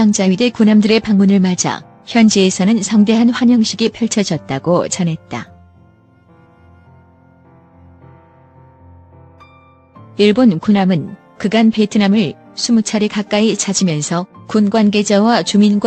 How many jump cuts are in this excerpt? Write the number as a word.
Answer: two